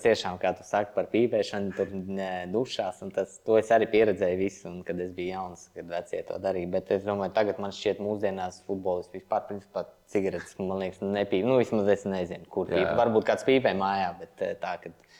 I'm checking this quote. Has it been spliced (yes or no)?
no